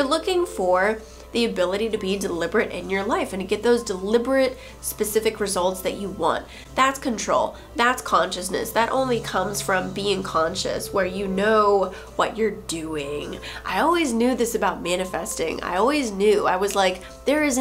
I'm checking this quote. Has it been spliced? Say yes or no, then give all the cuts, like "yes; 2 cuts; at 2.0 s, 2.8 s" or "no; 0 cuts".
no; 0 cuts